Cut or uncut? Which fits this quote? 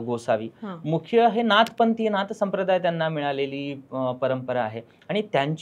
uncut